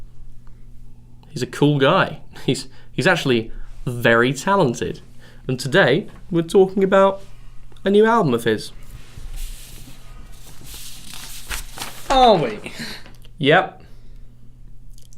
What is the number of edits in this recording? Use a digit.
1